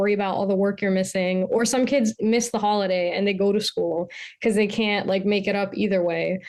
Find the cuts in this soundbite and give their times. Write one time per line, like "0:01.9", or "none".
none